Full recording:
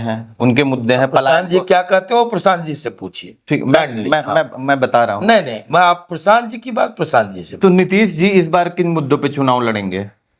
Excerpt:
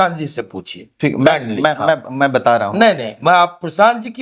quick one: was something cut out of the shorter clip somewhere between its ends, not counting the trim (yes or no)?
no